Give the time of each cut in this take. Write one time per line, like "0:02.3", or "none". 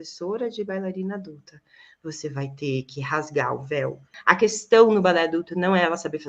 0:04.1